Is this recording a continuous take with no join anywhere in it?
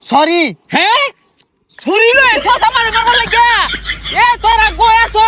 yes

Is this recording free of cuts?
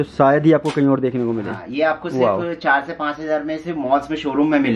yes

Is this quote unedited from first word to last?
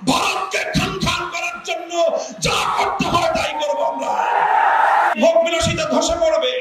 no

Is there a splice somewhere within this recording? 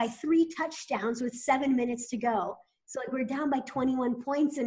no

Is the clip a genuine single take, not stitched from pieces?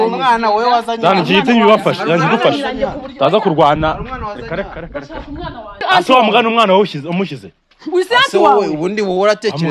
no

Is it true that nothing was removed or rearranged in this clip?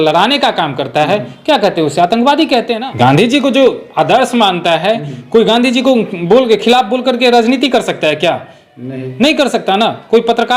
no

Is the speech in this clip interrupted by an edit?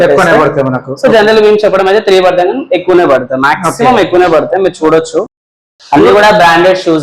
no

